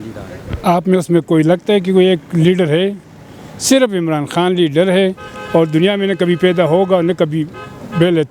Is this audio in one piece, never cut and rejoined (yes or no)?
yes